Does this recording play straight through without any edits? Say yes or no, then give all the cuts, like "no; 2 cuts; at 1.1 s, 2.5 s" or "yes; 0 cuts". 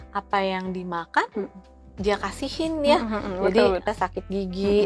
no; 1 cut; at 3.8 s